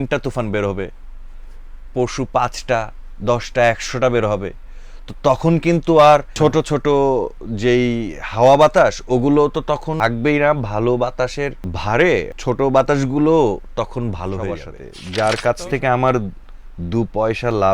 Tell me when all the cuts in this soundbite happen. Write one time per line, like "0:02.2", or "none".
0:06.3
0:09.9
0:11.7
0:12.3
0:14.7